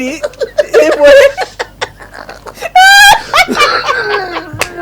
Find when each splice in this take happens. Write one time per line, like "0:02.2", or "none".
none